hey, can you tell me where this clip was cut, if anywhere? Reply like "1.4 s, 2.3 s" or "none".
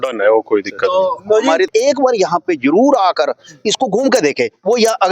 1.7 s